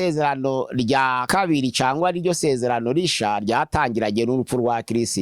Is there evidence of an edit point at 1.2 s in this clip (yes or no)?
yes